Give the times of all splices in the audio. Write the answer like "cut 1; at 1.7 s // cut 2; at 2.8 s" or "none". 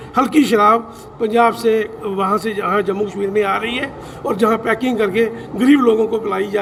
none